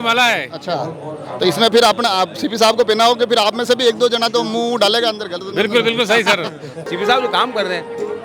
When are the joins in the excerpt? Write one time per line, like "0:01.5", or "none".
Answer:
0:06.9